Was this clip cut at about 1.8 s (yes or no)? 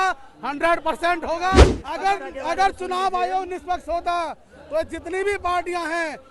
yes